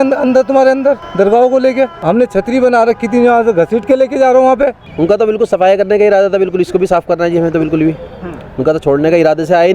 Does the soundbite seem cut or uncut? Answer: cut